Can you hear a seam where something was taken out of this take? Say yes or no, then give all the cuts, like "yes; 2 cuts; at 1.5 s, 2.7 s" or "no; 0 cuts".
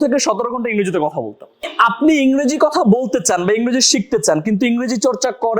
yes; 1 cut; at 1.7 s